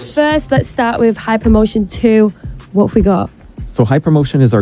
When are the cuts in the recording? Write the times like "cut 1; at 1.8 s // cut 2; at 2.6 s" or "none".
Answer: cut 1; at 1.3 s // cut 2; at 2.7 s